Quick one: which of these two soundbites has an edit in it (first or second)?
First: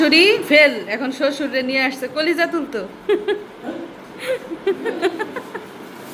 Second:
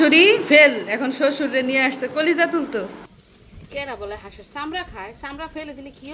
second